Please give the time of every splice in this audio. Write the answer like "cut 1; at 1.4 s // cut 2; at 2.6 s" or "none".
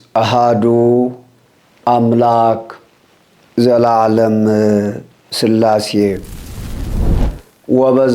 cut 1; at 6.4 s // cut 2; at 7.3 s